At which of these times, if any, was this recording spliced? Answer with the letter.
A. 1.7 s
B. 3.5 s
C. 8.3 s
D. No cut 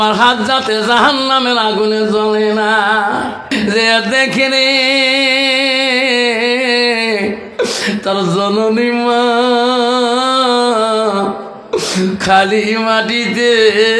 B